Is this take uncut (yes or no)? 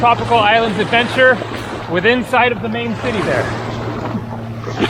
yes